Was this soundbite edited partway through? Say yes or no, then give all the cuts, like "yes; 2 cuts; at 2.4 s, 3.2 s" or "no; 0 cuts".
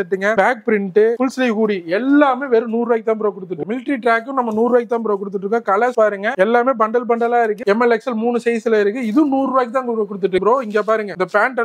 yes; 3 cuts; at 3.6 s, 7.6 s, 10.4 s